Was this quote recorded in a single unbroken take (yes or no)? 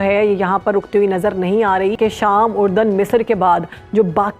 no